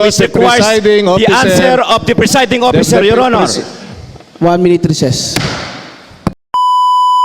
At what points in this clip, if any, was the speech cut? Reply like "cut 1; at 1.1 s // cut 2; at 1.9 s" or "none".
cut 1; at 6.4 s